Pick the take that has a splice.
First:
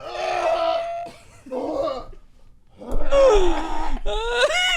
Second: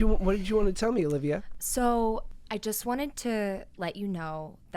second; 2 cuts; at 1.5 s, 2.3 s

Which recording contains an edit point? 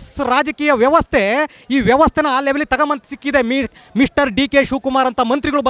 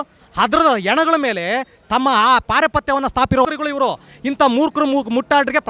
second; 1 cut; at 3.5 s

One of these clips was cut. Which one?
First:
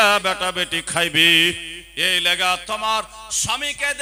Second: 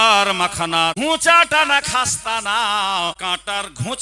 second; 2 cuts; at 0.9 s, 3.2 s

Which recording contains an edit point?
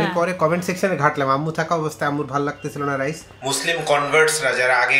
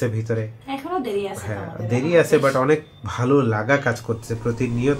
first; 1 cut; at 3.3 s

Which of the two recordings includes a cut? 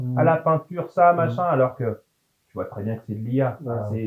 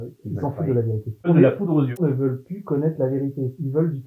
second; 2 cuts; at 1.3 s, 2.0 s

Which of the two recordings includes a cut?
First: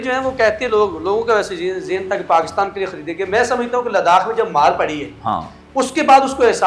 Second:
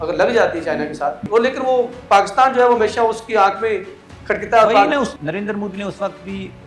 second; 2 cuts; at 1.2 s, 5.1 s

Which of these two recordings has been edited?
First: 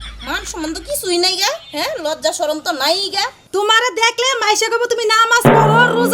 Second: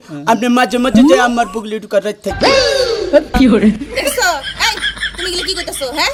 first; 1 cut; at 3.3 s

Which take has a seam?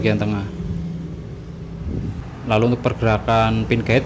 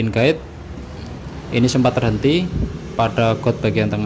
first; 1 cut; at 2.2 s

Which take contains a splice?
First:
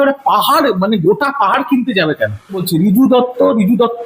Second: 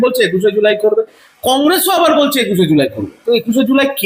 first; 1 cut; at 2.6 s

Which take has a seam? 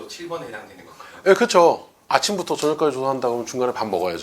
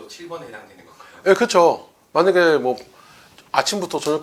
first; 1 cut; at 1.9 s

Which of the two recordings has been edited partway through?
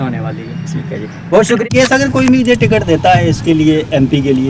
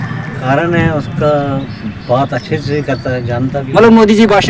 first; 1 cut; at 1.6 s

